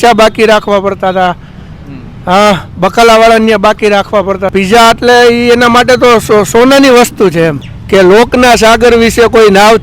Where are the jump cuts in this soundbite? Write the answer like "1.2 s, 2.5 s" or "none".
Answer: 4.5 s, 7.7 s